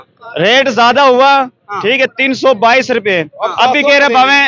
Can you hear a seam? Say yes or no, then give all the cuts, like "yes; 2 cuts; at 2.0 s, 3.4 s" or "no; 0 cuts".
no; 0 cuts